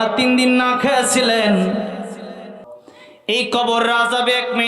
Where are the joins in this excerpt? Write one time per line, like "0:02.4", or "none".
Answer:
0:02.6

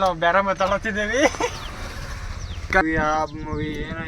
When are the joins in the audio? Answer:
0:02.8

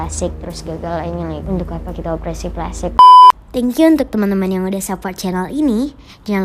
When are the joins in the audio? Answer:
0:02.9

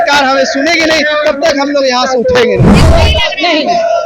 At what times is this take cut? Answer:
0:02.8

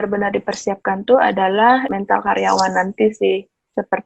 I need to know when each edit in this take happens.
0:01.8

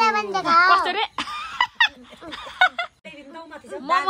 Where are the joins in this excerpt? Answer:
0:03.1

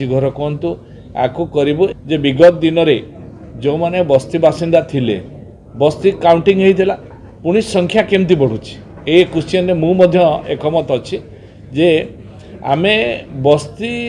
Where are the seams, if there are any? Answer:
0:01.9

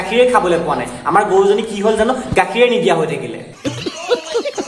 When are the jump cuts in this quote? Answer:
0:03.5

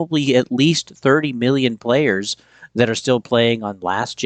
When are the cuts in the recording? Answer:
none

